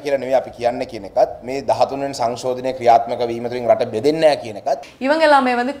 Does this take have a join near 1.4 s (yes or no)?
no